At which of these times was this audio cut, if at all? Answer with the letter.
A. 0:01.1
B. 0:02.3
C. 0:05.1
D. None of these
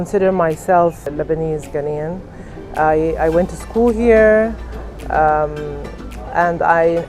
A